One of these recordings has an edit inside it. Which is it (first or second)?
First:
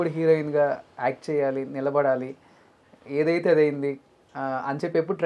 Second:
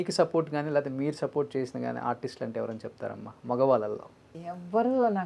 second